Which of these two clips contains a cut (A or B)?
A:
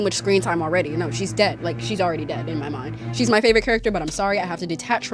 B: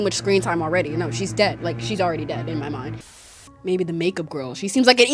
B